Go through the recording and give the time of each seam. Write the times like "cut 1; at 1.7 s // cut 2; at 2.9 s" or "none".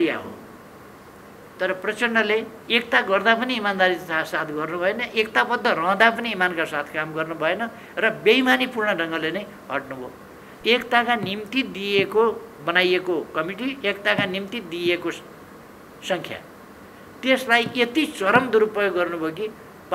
none